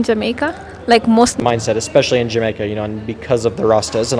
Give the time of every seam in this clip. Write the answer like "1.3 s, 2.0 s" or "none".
1.4 s